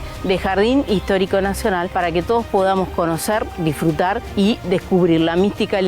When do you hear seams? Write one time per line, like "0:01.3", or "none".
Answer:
0:01.9
0:04.2